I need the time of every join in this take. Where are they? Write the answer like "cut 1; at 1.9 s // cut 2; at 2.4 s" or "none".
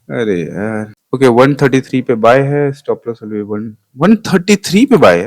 cut 1; at 1.0 s